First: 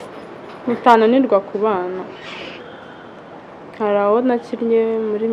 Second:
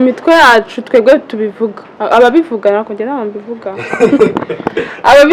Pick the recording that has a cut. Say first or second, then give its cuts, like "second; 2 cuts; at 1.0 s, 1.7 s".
first; 1 cut; at 2.5 s